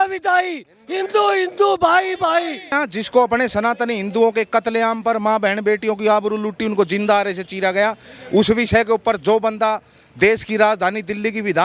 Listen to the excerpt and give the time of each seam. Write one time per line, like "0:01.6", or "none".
0:02.8